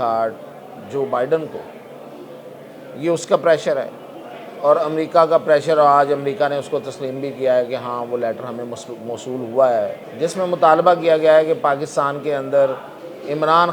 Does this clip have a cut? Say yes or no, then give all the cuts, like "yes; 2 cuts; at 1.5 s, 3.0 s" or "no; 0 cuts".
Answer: yes; 1 cut; at 10.0 s